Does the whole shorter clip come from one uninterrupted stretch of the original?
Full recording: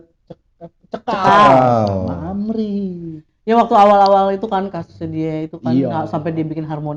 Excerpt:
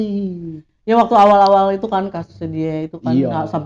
yes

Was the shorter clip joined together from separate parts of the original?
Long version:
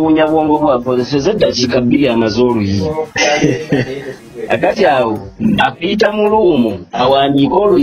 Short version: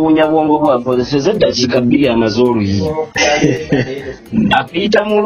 yes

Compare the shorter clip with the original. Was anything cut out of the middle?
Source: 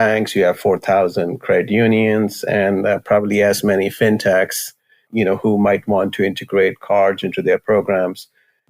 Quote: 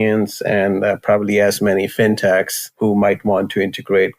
yes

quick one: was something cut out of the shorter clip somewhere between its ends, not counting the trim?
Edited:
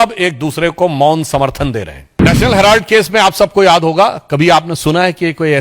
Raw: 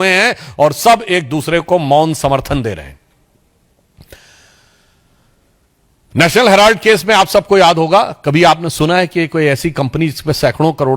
yes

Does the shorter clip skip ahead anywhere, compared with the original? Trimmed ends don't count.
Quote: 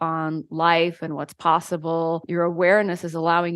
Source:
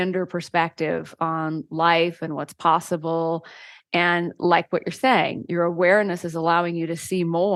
yes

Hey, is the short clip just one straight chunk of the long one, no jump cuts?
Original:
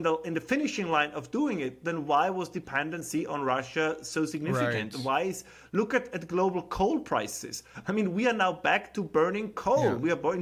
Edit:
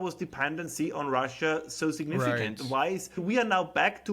no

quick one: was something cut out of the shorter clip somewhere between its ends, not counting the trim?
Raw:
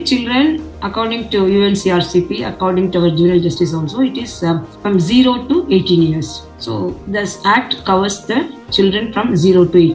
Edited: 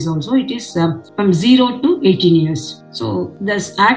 no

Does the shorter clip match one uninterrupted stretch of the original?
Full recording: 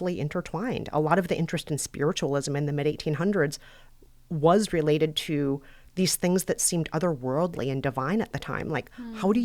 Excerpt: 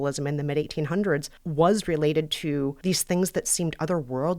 no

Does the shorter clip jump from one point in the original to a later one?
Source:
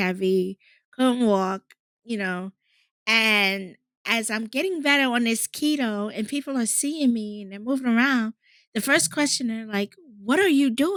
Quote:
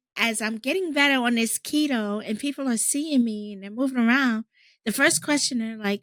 no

